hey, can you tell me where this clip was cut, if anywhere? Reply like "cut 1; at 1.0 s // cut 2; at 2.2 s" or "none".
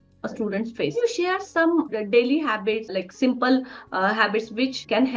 cut 1; at 0.9 s // cut 2; at 1.9 s // cut 3; at 2.9 s

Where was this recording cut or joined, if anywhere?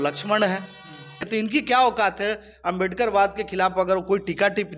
cut 1; at 1.3 s

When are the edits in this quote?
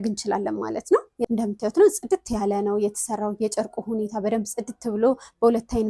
cut 1; at 1.1 s

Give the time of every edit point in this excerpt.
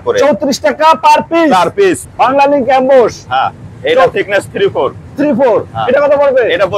cut 1; at 2.0 s

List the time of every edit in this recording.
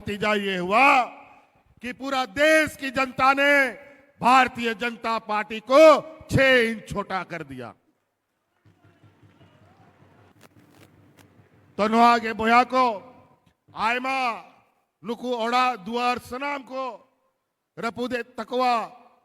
cut 1; at 10.3 s

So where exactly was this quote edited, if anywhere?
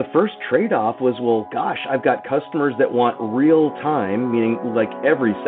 none

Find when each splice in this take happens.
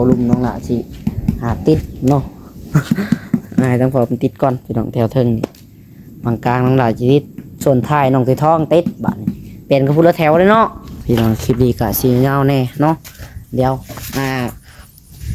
cut 1; at 10.9 s

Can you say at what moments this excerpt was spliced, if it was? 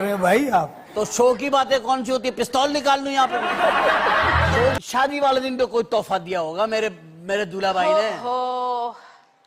cut 1; at 4.8 s

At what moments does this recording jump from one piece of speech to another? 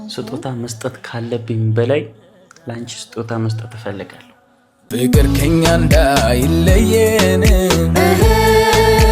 cut 1; at 4.9 s

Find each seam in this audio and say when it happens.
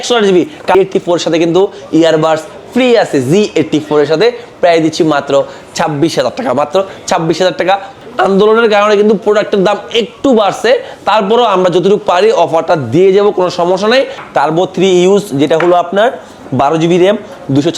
cut 1; at 0.8 s // cut 2; at 7.9 s // cut 3; at 14.2 s

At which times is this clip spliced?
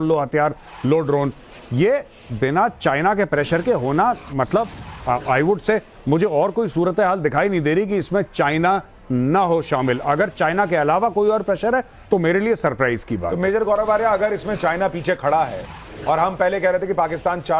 none

